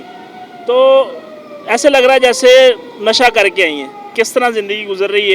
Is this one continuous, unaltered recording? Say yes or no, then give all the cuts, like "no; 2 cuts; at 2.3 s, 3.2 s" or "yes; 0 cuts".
no; 1 cut; at 4.1 s